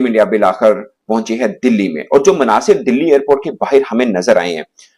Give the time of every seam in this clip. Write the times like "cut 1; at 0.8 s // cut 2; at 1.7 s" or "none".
none